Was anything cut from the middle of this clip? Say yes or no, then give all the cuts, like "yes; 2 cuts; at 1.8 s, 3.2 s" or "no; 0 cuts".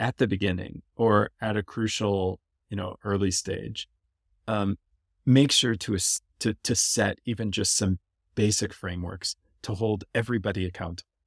no; 0 cuts